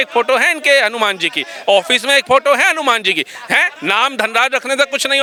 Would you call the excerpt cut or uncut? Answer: uncut